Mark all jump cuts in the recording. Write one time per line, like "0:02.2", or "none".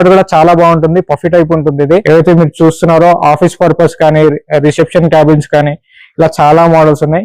0:02.0